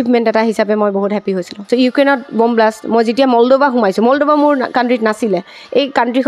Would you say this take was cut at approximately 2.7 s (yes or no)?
no